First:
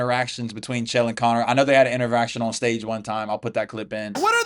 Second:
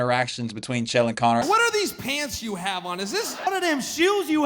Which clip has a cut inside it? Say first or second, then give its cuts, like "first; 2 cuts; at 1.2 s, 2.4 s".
second; 2 cuts; at 1.4 s, 3.5 s